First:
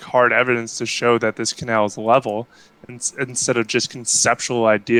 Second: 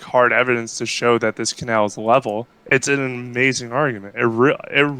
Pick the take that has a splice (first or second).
second